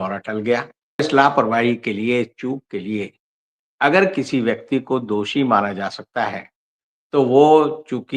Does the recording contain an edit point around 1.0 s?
yes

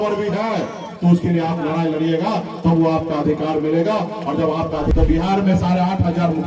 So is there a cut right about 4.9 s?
yes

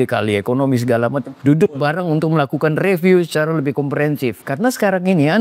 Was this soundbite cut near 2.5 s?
no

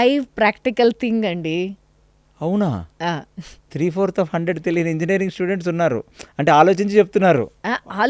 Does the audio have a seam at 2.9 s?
yes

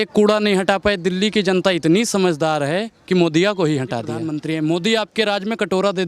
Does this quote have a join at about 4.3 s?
yes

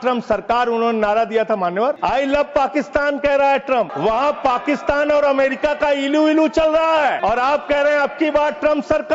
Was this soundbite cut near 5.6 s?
no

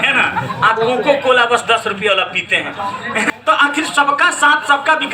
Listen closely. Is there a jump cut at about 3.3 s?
yes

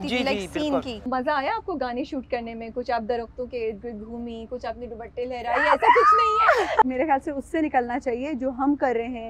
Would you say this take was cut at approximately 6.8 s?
yes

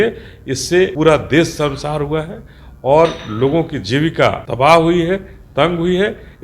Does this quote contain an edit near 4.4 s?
yes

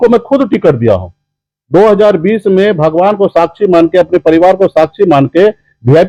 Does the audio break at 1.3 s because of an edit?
no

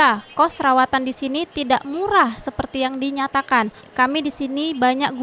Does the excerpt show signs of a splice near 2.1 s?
no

